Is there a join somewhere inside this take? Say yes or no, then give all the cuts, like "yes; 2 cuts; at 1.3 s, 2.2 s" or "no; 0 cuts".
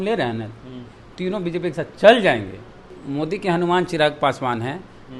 yes; 1 cut; at 3.0 s